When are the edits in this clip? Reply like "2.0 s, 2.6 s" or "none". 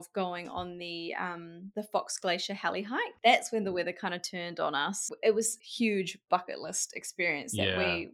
1.6 s, 3.1 s, 5.0 s, 5.6 s